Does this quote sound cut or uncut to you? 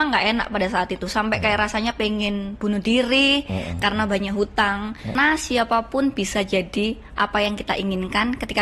cut